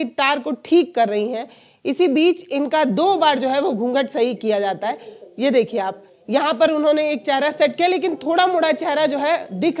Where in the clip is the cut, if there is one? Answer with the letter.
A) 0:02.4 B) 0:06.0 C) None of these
C